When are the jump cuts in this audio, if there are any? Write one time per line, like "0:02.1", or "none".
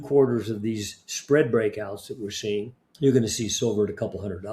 0:02.8